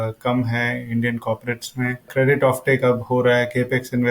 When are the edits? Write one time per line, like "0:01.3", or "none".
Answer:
0:02.1